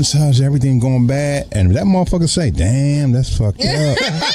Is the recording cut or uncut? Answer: uncut